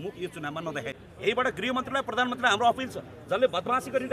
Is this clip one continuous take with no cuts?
no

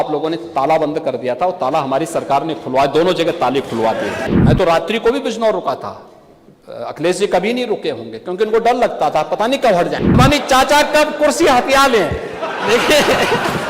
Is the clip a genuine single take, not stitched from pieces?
no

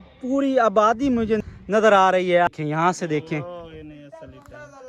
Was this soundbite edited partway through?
yes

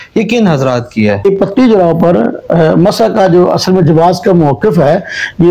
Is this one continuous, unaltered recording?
no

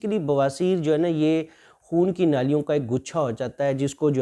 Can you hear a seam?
no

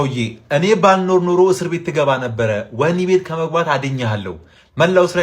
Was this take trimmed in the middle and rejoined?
no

